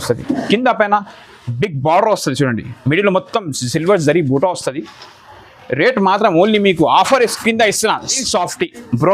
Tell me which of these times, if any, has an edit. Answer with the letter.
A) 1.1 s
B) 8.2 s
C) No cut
B